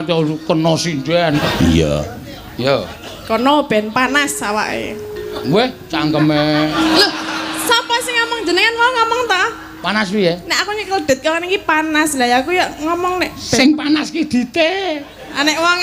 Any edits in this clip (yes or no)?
yes